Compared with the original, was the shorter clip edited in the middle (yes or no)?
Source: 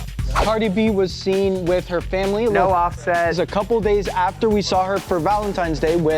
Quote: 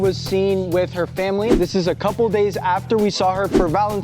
yes